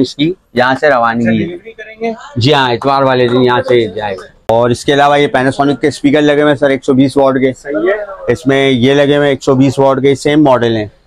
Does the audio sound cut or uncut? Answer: uncut